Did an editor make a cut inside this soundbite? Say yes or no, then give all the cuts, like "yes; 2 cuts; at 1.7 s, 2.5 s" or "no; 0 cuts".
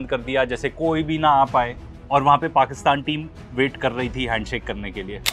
no; 0 cuts